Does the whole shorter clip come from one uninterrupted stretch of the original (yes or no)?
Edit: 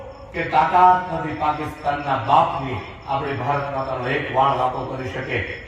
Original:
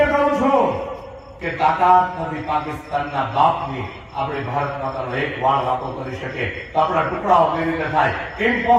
yes